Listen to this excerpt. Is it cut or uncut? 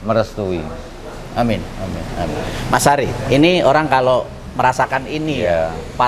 uncut